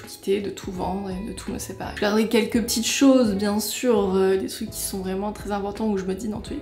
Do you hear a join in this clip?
no; 0 cuts

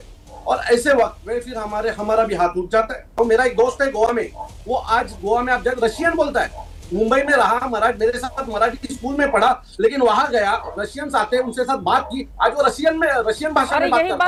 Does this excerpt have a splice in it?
no; 0 cuts

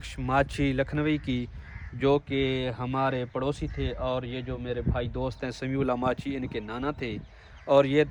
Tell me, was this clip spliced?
no; 0 cuts

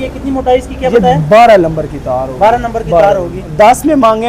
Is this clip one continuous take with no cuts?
yes; 0 cuts

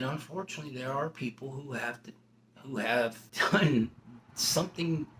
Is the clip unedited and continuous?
no; 1 cut; at 3.2 s

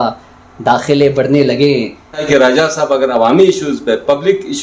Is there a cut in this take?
yes; 1 cut; at 2.2 s

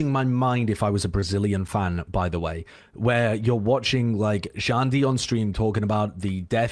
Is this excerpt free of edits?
yes; 0 cuts

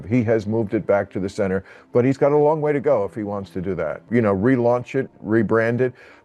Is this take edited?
yes; 1 cut; at 4.0 s

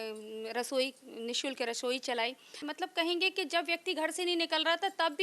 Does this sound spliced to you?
yes; 1 cut; at 2.7 s

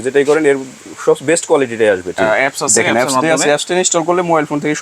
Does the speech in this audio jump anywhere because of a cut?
yes; 1 cut; at 2.1 s

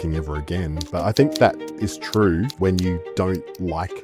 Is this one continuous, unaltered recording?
no; 1 cut; at 2.5 s

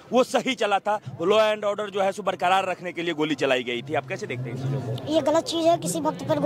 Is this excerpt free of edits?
yes; 0 cuts

